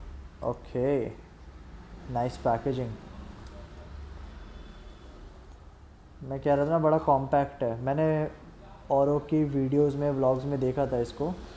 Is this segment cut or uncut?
uncut